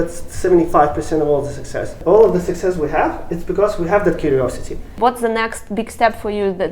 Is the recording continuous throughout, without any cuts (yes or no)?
no